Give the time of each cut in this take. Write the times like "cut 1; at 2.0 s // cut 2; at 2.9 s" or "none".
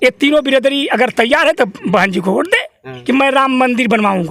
cut 1; at 2.9 s